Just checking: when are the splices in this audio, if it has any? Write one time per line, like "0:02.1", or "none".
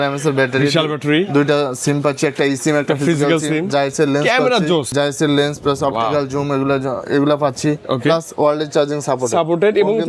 0:04.9